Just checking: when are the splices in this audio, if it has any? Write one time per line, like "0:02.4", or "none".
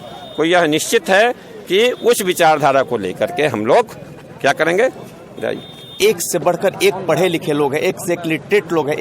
0:05.9